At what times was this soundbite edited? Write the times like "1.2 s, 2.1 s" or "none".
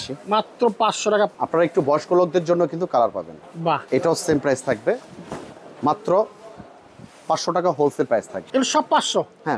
1.3 s, 3.8 s, 8.4 s